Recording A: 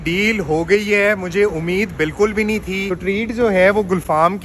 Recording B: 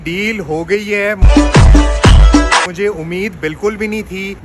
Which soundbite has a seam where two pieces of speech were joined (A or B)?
A